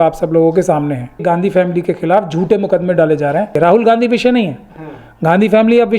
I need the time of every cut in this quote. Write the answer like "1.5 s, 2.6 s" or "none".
1.2 s, 3.5 s